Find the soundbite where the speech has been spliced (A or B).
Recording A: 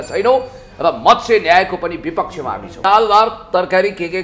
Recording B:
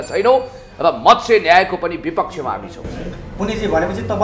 A